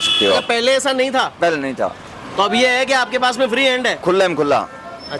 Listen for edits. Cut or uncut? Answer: uncut